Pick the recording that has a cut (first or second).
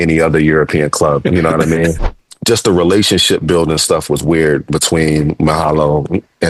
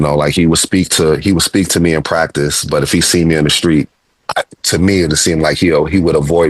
first